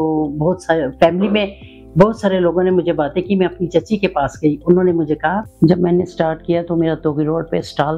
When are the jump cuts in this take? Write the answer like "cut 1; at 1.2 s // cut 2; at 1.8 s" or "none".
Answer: cut 1; at 5.5 s